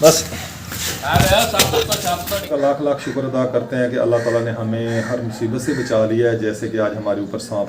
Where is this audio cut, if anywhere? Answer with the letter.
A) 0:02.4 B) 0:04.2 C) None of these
A